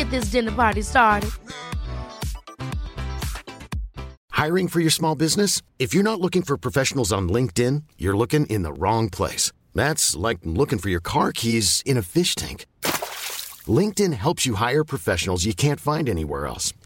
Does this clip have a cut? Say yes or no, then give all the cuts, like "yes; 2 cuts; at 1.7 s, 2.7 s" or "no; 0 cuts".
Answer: yes; 1 cut; at 4.2 s